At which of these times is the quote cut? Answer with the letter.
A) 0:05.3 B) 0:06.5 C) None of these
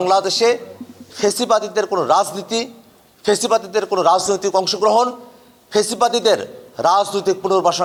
C